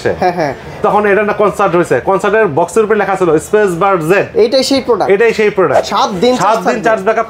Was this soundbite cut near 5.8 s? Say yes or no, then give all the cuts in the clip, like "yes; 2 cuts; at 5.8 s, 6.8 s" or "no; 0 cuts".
yes; 1 cut; at 5.8 s